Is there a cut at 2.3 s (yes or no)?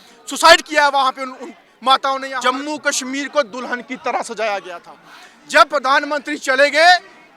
yes